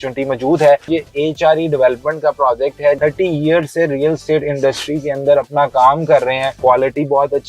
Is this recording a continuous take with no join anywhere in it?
no; 2 cuts; at 3.0 s, 6.5 s

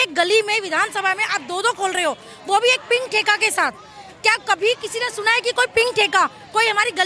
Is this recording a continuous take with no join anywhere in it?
yes; 0 cuts

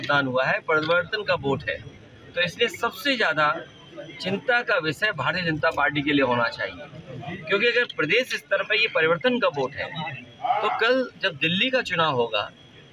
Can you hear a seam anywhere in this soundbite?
no; 0 cuts

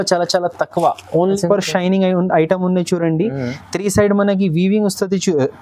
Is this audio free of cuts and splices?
no; 1 cut; at 1.4 s

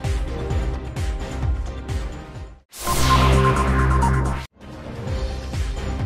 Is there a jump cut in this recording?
no; 0 cuts

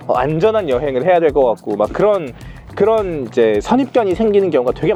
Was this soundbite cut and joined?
no; 0 cuts

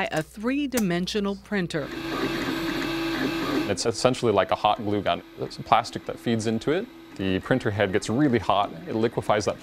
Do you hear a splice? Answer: yes; 1 cut; at 6.0 s

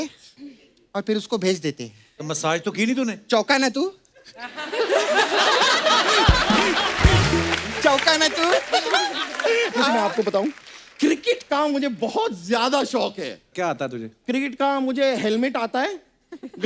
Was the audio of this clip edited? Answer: yes; 1 cut; at 9.8 s

